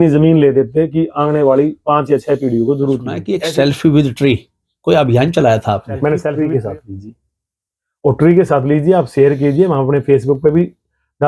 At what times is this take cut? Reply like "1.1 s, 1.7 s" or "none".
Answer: 3.2 s, 6.3 s